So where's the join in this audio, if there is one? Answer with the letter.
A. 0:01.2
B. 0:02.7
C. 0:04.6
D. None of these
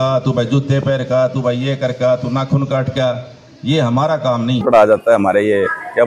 C